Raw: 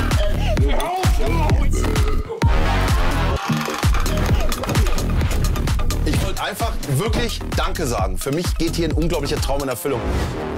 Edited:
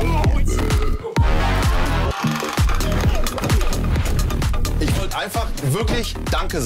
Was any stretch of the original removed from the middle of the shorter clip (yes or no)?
no